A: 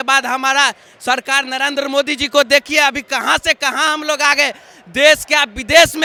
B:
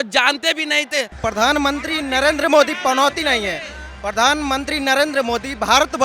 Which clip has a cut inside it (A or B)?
B